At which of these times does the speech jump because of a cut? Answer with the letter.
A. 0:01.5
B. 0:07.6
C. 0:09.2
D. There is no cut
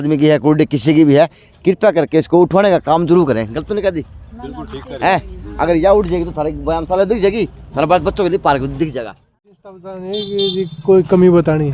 C